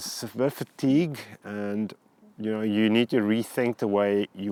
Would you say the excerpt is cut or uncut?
uncut